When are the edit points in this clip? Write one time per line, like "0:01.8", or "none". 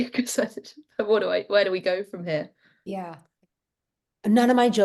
0:03.2